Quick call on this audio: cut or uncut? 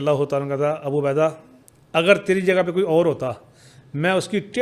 uncut